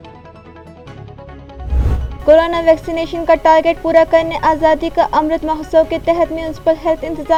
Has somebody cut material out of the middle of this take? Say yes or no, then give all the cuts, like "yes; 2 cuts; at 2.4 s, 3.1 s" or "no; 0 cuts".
no; 0 cuts